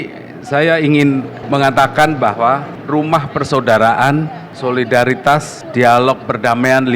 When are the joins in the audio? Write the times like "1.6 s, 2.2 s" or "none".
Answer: 1.4 s, 2.7 s, 4.4 s, 5.6 s